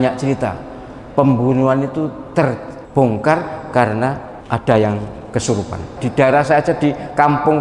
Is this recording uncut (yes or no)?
no